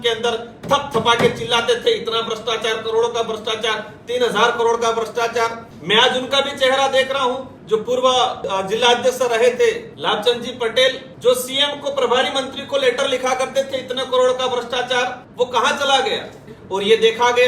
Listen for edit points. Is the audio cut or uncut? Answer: cut